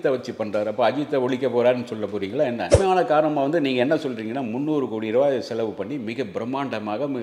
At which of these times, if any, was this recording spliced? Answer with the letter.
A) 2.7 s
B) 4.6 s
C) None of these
A